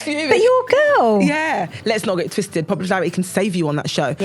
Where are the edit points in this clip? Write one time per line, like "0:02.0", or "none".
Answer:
0:01.8